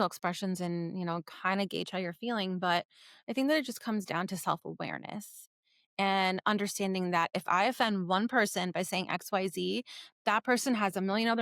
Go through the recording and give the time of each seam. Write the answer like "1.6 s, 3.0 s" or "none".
7.3 s